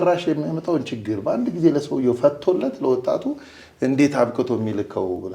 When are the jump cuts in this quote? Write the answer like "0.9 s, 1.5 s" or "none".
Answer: none